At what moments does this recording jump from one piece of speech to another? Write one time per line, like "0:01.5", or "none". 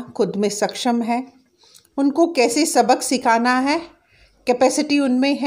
none